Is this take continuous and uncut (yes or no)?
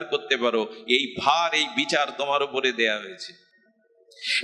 yes